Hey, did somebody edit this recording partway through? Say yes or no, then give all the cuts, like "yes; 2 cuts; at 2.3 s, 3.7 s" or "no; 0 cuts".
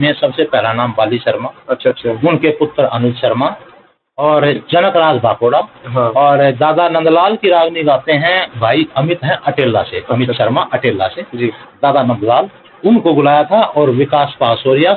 no; 0 cuts